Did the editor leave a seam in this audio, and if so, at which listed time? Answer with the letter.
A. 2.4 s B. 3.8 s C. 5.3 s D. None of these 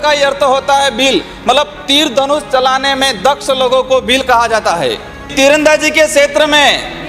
C